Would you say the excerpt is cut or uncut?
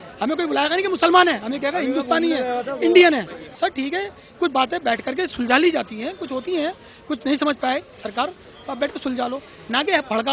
cut